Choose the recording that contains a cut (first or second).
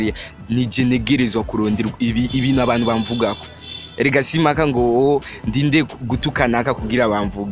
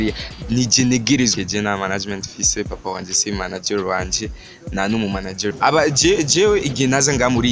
second